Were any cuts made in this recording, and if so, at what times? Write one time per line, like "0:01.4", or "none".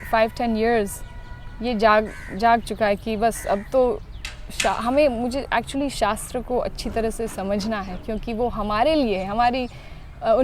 none